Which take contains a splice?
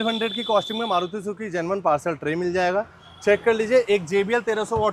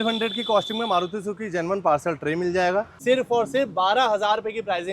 second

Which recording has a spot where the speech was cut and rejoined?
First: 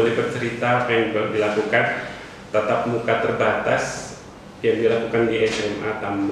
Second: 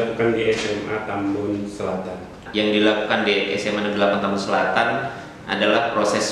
second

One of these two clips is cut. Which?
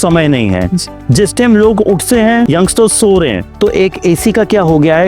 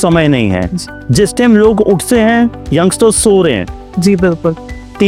first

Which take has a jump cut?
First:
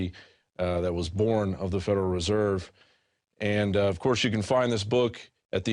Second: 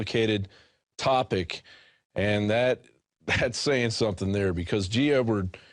second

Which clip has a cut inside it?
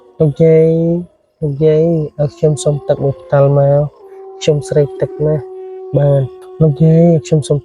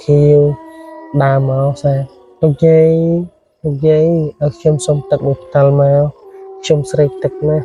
first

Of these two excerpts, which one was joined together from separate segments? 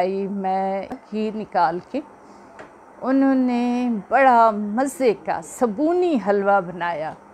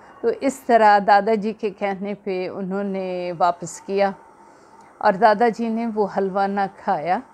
first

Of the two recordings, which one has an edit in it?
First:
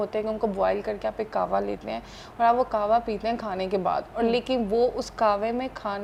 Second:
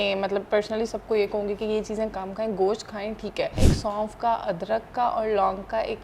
second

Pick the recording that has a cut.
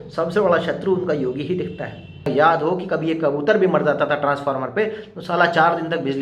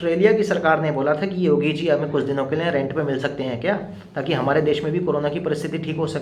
first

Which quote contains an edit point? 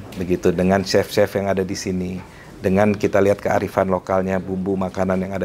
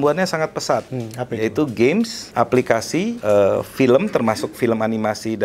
second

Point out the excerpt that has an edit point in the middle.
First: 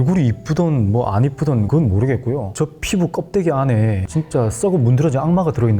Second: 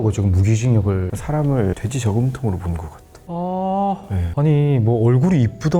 second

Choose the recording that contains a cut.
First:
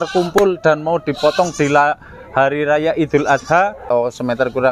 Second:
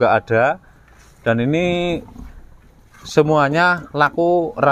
first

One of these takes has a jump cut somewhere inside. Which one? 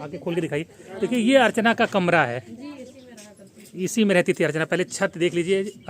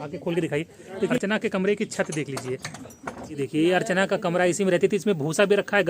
second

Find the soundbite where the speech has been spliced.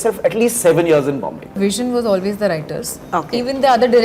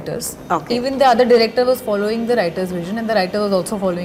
first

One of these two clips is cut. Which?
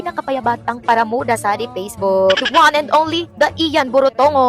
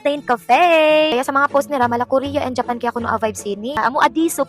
second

